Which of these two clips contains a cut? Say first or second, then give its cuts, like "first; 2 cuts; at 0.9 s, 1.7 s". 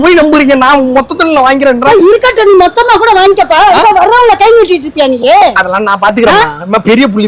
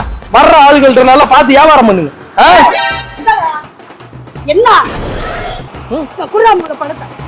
second; 1 cut; at 5.5 s